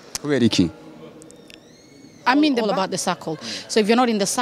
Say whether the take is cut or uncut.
cut